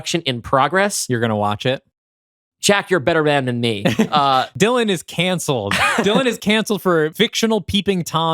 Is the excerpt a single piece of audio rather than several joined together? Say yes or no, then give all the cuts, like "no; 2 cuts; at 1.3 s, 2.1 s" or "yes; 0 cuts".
no; 2 cuts; at 4.5 s, 7.1 s